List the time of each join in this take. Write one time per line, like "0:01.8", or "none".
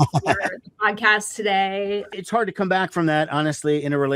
0:02.1